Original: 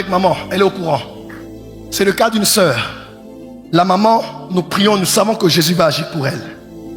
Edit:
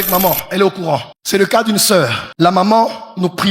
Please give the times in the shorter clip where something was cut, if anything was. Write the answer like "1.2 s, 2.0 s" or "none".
1.1 s, 2.2 s